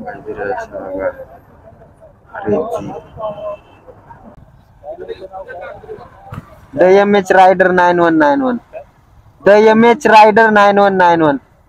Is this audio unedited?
yes; 0 cuts

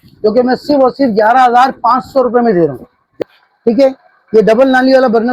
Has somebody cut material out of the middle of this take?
yes; 1 cut; at 3.2 s

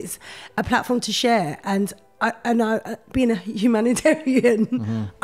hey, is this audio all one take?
yes; 0 cuts

